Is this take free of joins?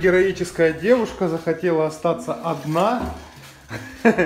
yes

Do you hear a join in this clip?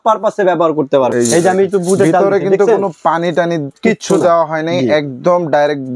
yes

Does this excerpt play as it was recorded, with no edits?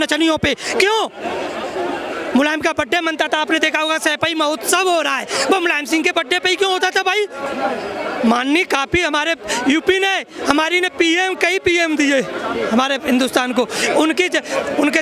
yes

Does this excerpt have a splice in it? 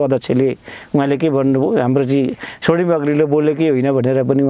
no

